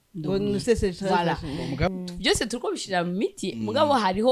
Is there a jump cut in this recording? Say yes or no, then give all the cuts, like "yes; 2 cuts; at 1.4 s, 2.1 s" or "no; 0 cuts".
yes; 1 cut; at 1.9 s